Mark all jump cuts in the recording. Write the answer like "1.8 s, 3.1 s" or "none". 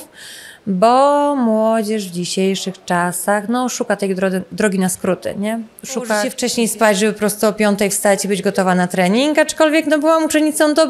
6.4 s